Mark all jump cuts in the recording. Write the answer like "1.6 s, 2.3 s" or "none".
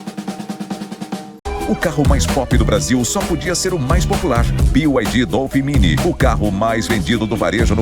1.3 s